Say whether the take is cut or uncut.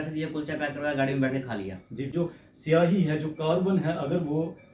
cut